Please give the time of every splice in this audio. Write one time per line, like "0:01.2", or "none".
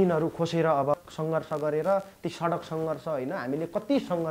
0:00.9